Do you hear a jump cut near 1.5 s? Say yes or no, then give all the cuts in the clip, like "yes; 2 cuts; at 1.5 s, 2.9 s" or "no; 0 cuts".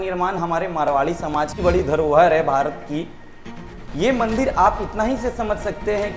yes; 1 cut; at 1.5 s